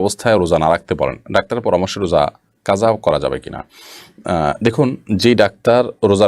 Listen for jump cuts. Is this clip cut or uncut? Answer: uncut